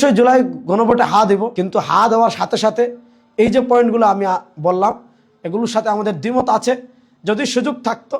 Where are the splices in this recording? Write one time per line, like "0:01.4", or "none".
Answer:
0:01.5